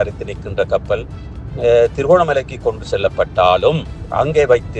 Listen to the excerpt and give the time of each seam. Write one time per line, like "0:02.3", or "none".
none